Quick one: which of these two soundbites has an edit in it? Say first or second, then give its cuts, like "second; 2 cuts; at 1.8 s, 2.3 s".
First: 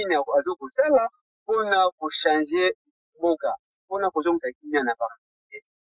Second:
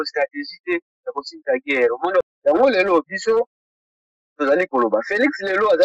second; 1 cut; at 2.2 s